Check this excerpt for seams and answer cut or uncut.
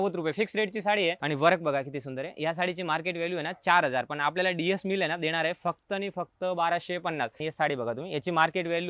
cut